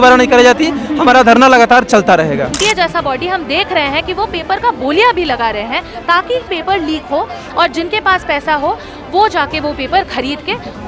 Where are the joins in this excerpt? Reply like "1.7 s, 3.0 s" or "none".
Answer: 2.5 s